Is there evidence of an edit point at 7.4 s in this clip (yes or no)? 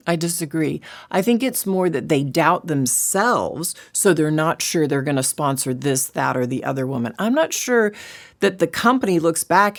no